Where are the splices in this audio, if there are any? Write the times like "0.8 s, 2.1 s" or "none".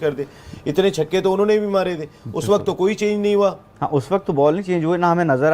4.3 s